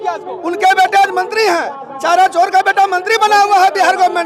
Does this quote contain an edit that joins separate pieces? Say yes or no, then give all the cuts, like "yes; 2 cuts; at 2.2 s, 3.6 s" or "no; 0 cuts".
no; 0 cuts